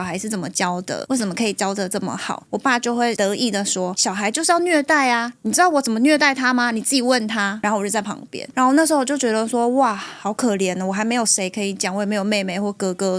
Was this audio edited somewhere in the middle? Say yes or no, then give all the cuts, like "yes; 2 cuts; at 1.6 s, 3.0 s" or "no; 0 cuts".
no; 0 cuts